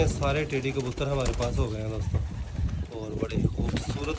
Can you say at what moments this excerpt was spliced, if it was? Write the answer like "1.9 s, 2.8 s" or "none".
none